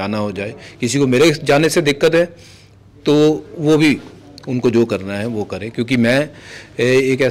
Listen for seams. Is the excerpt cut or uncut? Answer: uncut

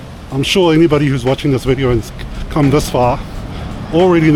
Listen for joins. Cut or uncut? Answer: uncut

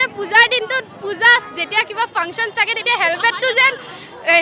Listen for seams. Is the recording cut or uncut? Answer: uncut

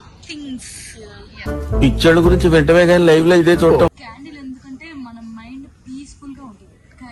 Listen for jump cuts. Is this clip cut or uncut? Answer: cut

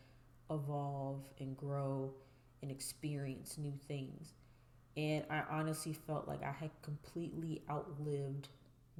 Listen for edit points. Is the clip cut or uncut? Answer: uncut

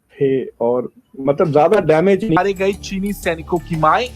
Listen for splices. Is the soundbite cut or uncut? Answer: cut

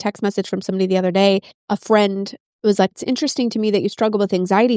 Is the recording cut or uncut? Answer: cut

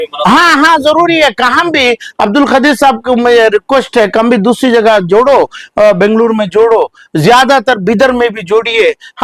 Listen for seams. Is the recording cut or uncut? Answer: uncut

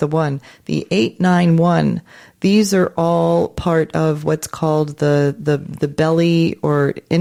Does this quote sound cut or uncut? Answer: uncut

